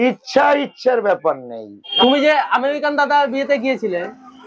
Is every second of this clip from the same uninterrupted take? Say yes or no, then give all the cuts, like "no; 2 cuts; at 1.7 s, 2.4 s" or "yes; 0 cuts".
no; 1 cut; at 2.0 s